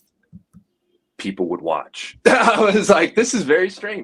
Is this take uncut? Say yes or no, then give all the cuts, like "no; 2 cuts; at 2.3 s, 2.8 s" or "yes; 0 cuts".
yes; 0 cuts